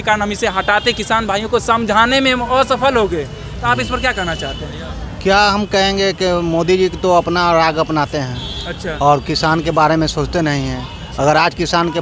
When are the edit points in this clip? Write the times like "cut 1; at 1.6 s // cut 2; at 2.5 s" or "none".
none